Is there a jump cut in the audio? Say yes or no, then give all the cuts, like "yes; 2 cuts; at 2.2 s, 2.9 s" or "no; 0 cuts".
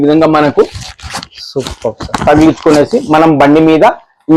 no; 0 cuts